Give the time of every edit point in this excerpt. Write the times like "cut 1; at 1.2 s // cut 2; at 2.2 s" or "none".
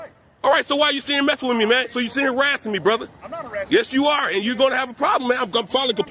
none